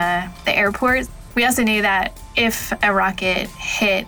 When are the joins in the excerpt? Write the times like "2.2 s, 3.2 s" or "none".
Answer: 1.2 s, 2.2 s